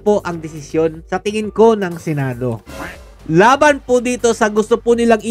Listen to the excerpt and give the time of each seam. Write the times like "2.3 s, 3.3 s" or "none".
none